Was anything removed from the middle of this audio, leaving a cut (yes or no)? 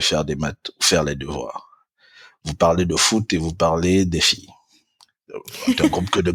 no